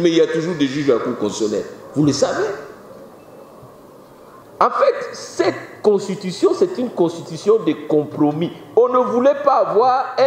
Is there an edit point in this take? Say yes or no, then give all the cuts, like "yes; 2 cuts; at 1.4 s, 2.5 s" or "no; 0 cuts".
yes; 1 cut; at 4.4 s